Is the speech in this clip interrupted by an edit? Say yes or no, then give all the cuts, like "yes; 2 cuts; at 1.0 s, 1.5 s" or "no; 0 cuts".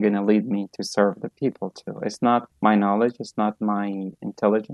no; 0 cuts